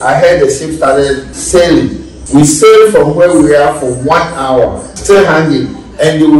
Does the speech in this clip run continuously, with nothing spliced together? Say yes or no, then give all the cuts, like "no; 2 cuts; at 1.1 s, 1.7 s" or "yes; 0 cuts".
no; 3 cuts; at 1.3 s, 2.1 s, 4.9 s